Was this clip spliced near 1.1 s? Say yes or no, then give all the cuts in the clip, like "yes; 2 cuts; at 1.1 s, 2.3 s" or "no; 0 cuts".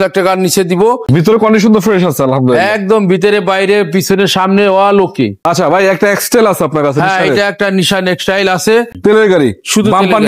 yes; 3 cuts; at 1.1 s, 5.4 s, 8.9 s